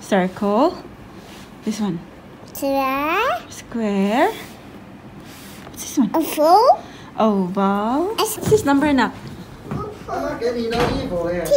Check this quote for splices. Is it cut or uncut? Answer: cut